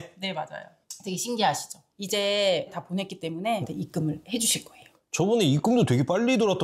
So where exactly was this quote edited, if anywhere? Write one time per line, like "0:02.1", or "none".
none